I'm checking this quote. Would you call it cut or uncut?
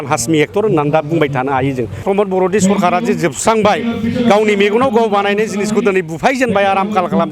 cut